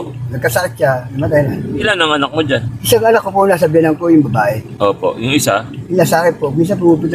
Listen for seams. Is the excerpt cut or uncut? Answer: cut